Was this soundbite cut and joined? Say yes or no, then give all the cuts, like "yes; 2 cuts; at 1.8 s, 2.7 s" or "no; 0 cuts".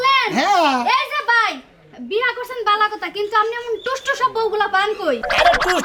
no; 0 cuts